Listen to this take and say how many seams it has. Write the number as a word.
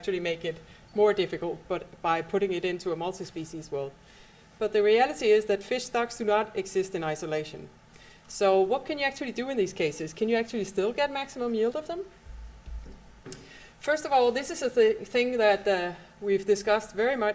zero